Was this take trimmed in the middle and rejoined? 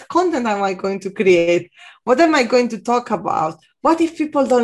no; 0 cuts

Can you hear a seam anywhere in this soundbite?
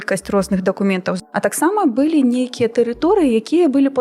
yes; 1 cut; at 1.2 s

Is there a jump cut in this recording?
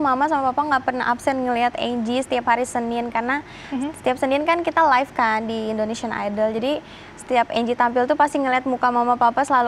no; 0 cuts

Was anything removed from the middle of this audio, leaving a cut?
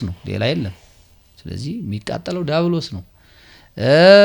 no; 0 cuts

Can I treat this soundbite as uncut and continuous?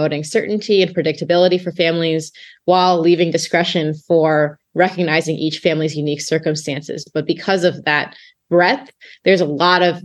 yes; 0 cuts

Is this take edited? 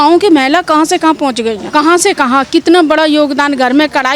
yes; 1 cut; at 1.6 s

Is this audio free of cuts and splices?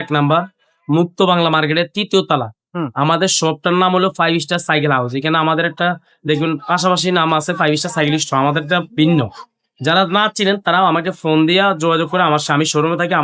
yes; 0 cuts

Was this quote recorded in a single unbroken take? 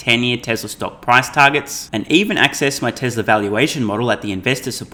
yes; 0 cuts

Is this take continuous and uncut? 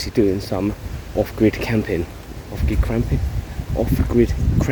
yes; 0 cuts

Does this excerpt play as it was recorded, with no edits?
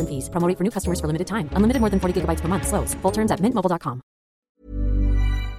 no; 1 cut; at 4.5 s

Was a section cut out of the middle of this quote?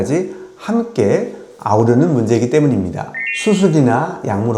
yes; 1 cut; at 3.1 s

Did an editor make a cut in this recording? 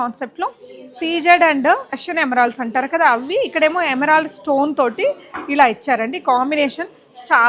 no; 0 cuts

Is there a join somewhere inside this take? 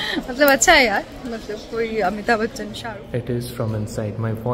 yes; 1 cut; at 2.7 s

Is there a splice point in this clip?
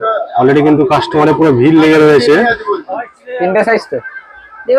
yes; 1 cut; at 2.9 s

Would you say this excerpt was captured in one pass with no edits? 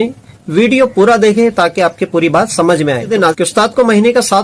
no; 1 cut; at 3.3 s

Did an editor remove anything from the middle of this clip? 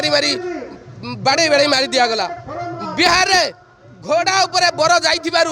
no; 0 cuts

